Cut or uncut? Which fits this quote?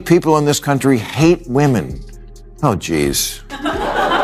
uncut